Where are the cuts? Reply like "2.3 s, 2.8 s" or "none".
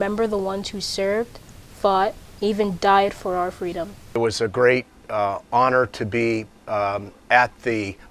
4.0 s